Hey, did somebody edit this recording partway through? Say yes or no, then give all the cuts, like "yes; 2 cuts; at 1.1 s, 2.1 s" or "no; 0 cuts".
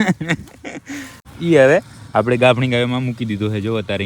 yes; 1 cut; at 1.2 s